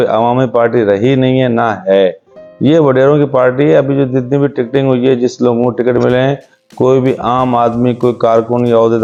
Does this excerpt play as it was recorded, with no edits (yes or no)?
yes